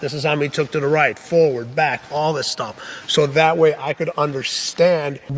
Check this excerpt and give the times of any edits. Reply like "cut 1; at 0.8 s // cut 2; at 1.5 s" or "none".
cut 1; at 1.6 s